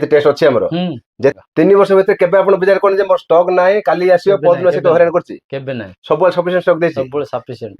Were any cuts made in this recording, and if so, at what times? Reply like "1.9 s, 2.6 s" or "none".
1.3 s